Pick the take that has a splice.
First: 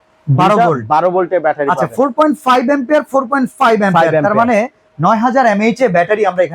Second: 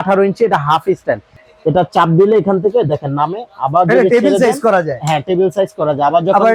second; 1 cut; at 1.3 s

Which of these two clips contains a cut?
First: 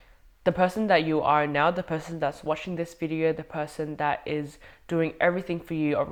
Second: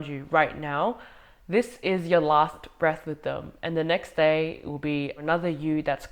second; 1 cut; at 5.2 s

